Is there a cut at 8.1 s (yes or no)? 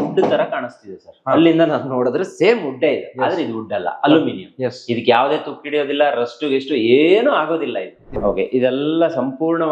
yes